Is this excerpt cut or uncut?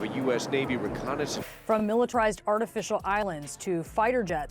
cut